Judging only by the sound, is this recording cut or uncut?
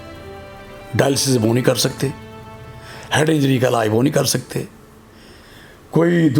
uncut